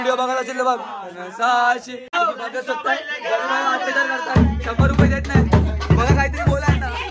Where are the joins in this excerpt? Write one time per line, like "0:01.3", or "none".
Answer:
0:02.0